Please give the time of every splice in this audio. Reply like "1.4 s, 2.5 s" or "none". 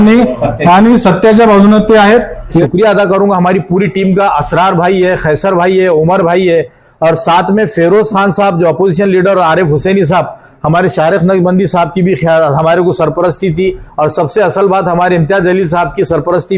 2.6 s